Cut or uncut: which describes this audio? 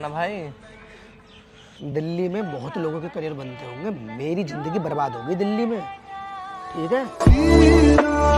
uncut